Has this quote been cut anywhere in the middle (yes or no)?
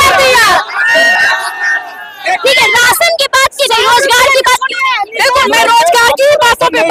no